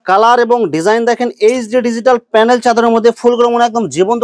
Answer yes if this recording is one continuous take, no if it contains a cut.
yes